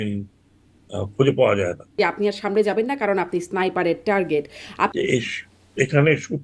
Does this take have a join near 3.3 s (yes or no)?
no